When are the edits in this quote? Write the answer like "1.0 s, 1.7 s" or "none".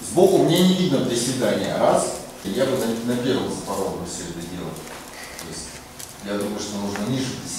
2.4 s